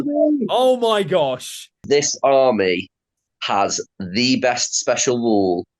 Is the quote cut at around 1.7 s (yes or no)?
yes